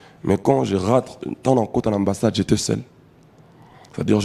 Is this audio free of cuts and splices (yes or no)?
yes